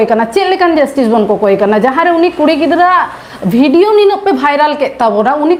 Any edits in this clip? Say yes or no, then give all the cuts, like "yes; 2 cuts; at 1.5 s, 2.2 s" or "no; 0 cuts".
no; 0 cuts